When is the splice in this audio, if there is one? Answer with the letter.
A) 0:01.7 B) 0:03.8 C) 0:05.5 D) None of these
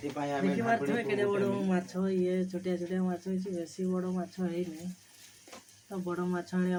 D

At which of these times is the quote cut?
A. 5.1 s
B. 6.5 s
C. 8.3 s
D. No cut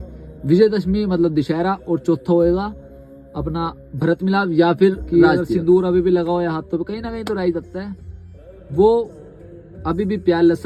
A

